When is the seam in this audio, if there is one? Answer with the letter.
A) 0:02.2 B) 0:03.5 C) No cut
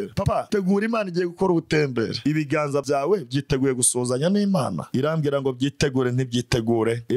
A